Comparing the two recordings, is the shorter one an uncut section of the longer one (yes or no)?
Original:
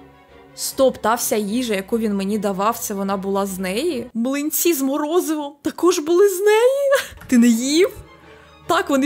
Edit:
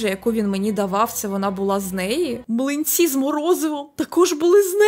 yes